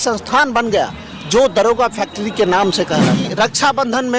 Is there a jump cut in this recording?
yes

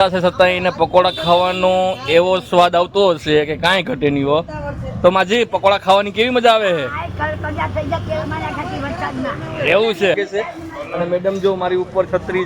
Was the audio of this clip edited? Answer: yes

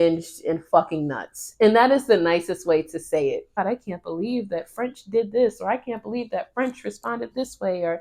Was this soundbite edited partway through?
yes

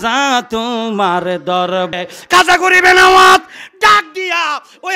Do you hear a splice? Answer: yes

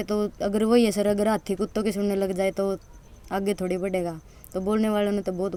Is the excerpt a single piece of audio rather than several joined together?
yes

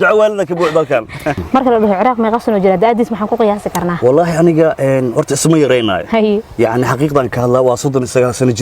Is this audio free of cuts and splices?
no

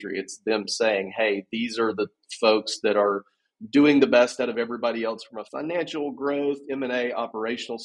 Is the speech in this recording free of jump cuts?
no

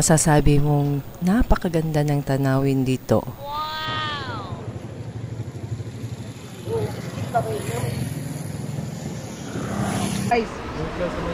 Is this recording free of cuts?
no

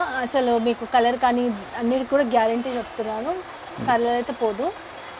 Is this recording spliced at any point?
no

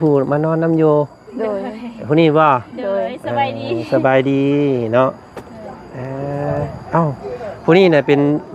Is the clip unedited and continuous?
yes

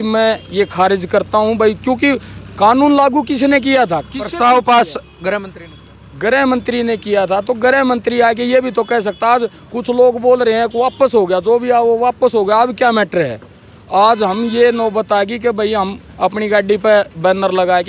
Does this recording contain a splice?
no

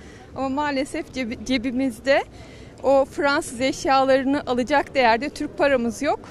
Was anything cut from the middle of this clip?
no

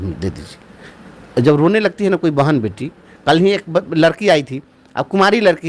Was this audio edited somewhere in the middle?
no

